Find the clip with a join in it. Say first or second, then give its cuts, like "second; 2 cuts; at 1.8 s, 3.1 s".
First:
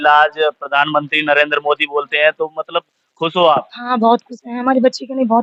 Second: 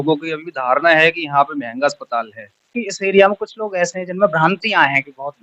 second; 1 cut; at 2.8 s